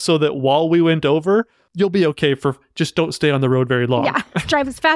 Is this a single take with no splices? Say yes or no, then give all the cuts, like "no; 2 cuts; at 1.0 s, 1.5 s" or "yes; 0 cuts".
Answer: no; 1 cut; at 1.6 s